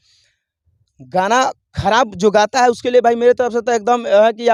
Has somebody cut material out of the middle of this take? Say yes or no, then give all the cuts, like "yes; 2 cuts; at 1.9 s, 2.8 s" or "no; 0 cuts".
no; 0 cuts